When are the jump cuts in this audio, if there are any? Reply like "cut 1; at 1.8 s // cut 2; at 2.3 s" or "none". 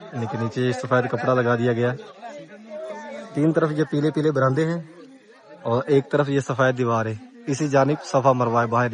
cut 1; at 3.2 s